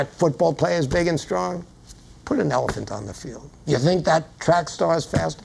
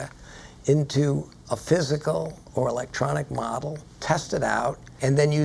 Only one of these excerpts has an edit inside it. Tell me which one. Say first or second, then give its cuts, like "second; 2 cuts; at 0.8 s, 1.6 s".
second; 2 cuts; at 2.4 s, 4.0 s